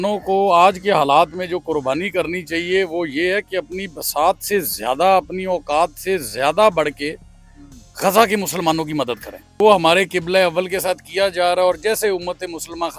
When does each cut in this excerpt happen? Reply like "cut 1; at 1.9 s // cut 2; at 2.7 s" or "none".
cut 1; at 9.6 s